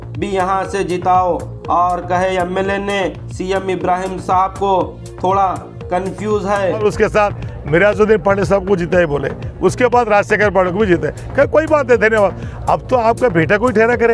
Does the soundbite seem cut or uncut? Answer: cut